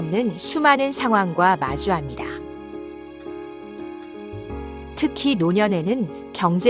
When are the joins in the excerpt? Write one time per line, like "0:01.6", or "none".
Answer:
none

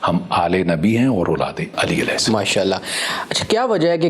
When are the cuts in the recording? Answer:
0:01.6

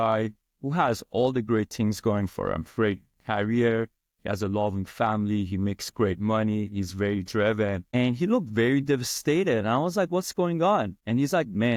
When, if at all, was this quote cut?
none

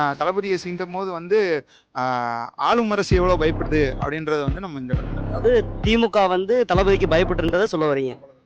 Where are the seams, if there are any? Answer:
none

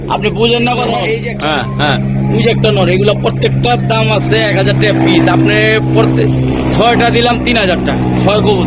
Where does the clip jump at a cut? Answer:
0:01.2

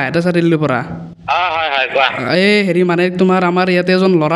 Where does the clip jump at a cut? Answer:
none

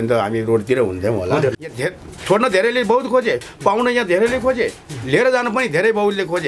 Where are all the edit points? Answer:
0:01.6

